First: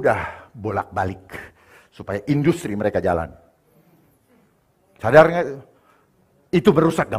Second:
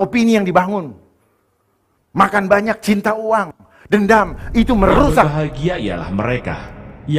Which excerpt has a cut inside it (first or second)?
second